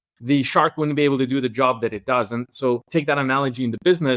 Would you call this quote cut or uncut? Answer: uncut